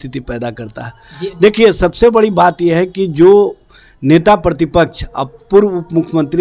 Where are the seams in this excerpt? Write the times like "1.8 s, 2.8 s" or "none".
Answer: none